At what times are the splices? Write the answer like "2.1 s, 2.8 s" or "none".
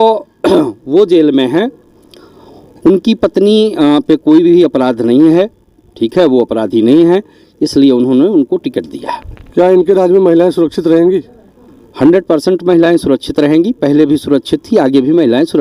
none